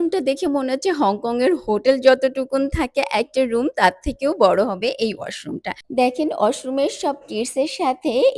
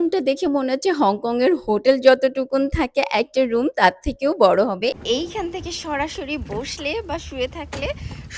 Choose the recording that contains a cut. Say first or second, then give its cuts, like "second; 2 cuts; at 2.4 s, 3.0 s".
second; 1 cut; at 5.0 s